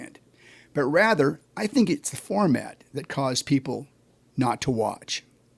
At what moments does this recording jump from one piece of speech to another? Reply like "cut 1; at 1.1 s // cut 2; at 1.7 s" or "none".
none